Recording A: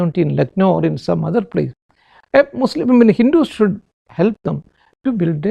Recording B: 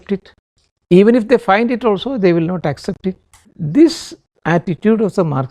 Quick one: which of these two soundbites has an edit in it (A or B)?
B